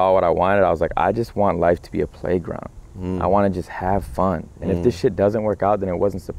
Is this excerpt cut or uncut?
uncut